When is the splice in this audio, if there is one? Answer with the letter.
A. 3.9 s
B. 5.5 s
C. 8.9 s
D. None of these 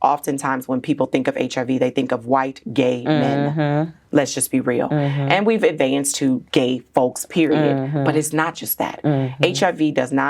D